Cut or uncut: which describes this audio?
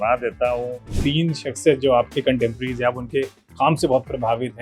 cut